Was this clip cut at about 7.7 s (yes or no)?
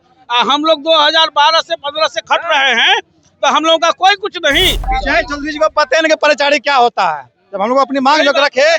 no